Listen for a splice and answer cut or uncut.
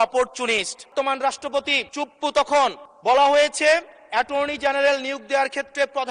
cut